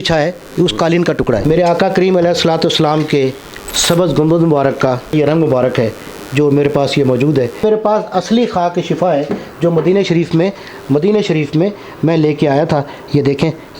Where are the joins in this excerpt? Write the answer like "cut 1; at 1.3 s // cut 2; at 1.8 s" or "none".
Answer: cut 1; at 1.4 s // cut 2; at 5.1 s // cut 3; at 7.6 s